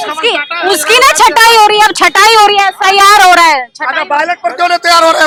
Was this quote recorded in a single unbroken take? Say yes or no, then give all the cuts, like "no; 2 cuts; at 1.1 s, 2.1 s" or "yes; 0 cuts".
yes; 0 cuts